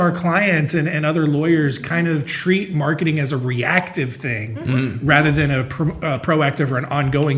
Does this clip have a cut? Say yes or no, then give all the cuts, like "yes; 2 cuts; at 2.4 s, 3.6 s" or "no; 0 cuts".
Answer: no; 0 cuts